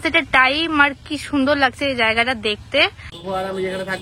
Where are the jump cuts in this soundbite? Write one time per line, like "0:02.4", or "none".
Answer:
0:03.1

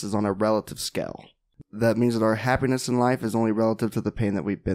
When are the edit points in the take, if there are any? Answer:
0:01.5

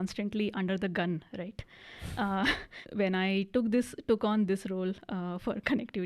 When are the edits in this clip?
0:02.8

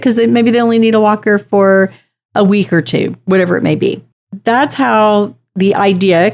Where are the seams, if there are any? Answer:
none

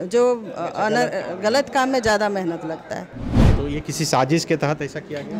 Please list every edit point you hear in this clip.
0:03.3

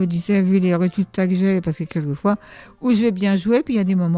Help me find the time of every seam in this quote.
none

